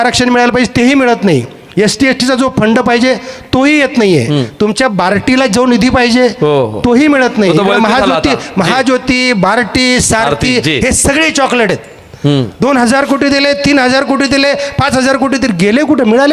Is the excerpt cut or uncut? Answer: uncut